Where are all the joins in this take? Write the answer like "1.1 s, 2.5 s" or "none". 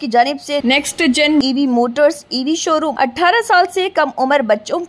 2.9 s

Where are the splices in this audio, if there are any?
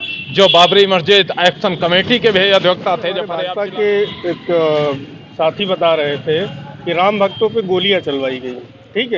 3.4 s

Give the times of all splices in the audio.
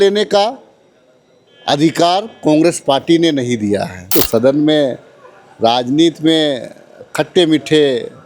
4.0 s

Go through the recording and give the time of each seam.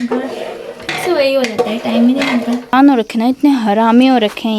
2.7 s

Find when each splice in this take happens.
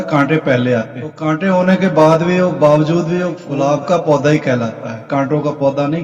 1.2 s, 3.4 s

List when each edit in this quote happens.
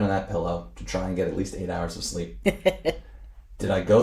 2.3 s

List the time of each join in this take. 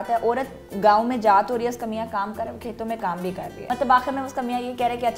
3.6 s

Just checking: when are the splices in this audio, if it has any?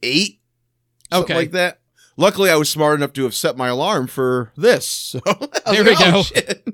1.9 s

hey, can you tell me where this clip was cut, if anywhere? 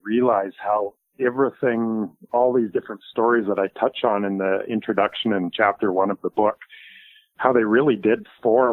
none

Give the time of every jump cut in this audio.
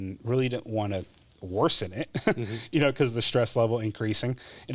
none

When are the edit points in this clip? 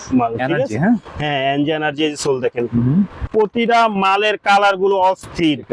3.3 s

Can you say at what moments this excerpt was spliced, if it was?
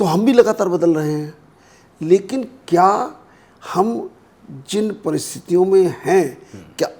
none

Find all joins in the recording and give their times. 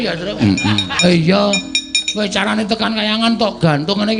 1.0 s

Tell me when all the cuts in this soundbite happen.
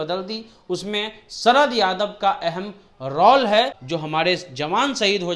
3.8 s

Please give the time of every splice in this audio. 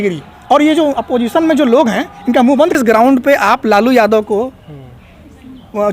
2.8 s

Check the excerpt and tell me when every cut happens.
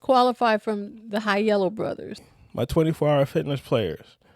2.3 s

